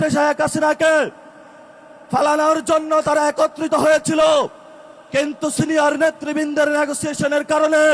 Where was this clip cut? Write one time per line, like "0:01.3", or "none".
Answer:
none